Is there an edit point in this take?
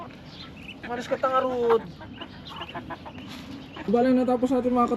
yes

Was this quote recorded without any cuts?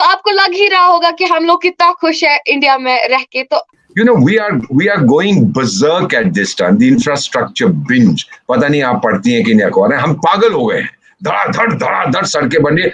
no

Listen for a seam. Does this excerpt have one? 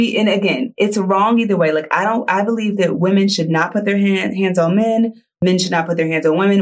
yes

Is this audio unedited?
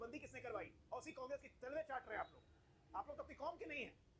no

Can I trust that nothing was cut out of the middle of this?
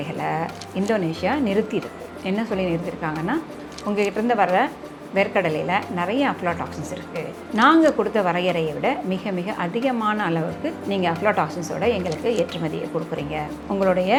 yes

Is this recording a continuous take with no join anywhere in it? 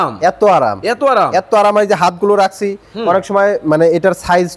yes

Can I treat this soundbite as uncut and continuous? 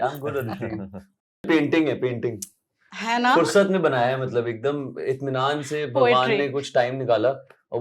no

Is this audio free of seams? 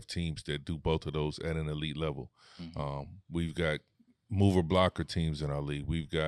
yes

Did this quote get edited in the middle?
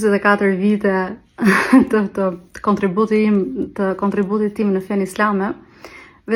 no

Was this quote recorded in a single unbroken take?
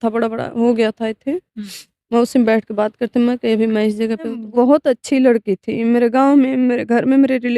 no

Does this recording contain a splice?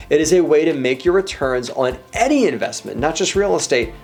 no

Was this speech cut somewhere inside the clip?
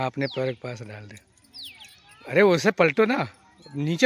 no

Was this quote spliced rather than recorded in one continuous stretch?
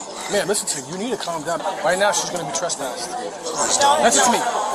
yes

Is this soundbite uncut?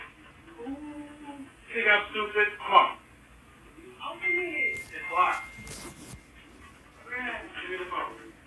yes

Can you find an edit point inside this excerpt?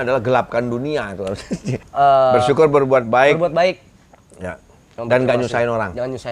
yes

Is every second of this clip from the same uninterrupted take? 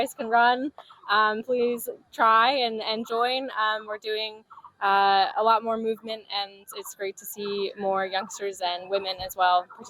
yes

